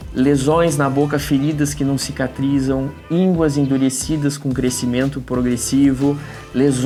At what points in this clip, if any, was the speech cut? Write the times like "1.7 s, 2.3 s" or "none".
none